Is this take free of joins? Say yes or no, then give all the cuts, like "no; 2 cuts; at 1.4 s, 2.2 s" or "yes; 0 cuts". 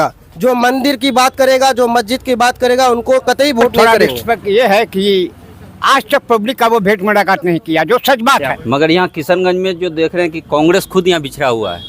no; 2 cuts; at 3.8 s, 8.5 s